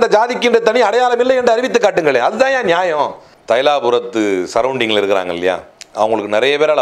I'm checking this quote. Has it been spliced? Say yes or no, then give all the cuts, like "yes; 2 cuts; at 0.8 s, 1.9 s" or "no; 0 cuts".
yes; 2 cuts; at 3.3 s, 5.8 s